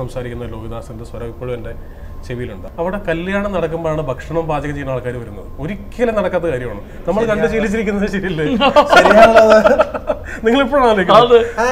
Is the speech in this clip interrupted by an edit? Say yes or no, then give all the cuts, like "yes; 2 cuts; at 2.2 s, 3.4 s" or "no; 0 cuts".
yes; 1 cut; at 2.6 s